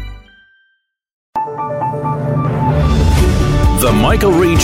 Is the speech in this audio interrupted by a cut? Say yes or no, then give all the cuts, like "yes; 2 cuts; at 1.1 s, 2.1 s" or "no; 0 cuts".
yes; 1 cut; at 1.2 s